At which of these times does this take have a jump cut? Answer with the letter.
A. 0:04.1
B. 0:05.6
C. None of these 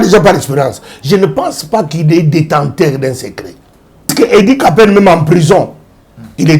A